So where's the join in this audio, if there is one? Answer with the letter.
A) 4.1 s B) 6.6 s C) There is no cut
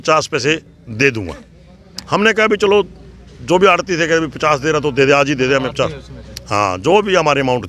C